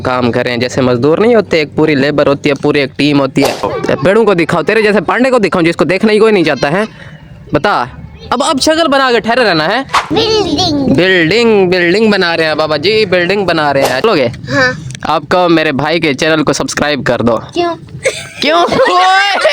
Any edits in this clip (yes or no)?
yes